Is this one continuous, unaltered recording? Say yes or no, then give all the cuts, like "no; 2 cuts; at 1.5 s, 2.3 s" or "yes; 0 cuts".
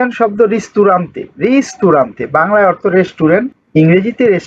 no; 1 cut; at 3.6 s